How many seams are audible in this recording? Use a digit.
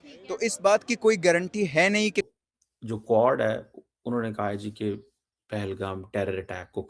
1